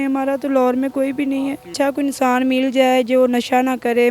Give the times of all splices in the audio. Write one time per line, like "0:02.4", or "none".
0:01.7